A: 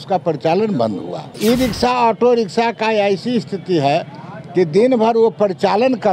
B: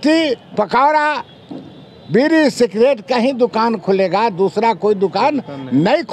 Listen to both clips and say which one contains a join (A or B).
A